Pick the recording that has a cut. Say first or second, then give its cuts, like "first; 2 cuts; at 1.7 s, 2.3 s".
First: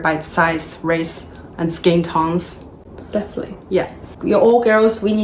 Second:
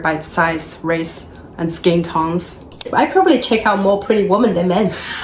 second; 1 cut; at 2.9 s